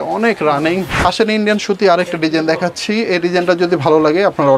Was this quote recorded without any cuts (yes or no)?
no